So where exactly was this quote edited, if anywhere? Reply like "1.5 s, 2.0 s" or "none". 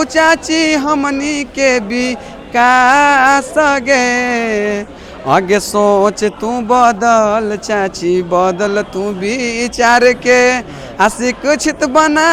none